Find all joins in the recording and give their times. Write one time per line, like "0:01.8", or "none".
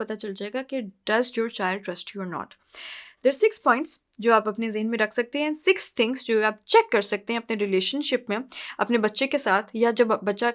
none